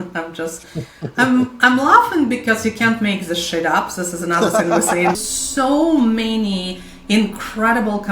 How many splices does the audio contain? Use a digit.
1